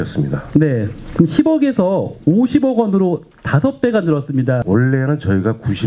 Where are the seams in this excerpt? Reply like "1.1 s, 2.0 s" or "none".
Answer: 4.6 s

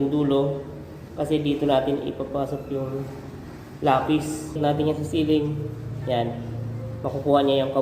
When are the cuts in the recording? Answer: 4.6 s

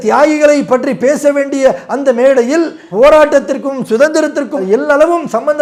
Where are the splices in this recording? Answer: none

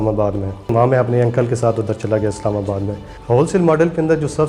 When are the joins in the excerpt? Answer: 0.7 s, 3.1 s

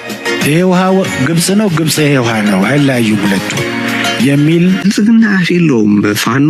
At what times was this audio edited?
4.8 s

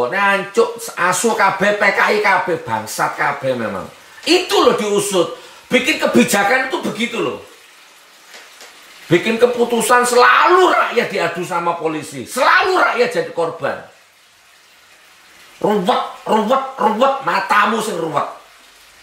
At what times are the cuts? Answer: none

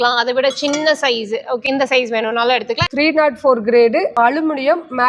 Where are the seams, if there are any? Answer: 1.6 s, 2.8 s, 4.1 s

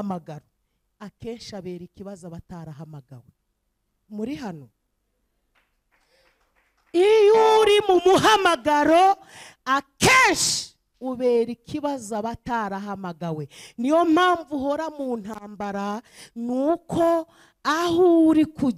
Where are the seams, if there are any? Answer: none

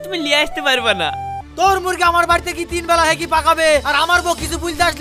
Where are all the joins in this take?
1.3 s

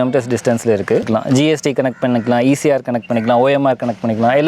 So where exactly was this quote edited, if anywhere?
1.1 s

